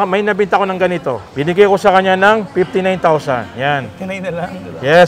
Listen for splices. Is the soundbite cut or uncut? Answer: cut